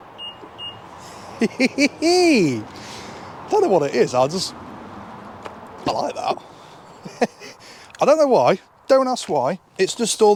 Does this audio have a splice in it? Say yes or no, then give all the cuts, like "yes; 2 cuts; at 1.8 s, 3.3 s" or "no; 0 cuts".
no; 0 cuts